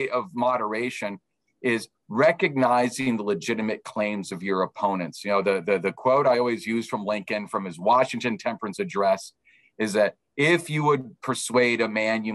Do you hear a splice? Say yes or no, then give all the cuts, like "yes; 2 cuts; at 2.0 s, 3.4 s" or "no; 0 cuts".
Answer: no; 0 cuts